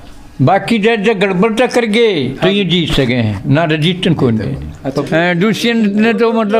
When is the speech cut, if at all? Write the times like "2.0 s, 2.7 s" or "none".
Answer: 5.0 s